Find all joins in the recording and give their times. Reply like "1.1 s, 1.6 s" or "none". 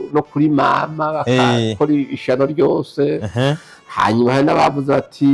none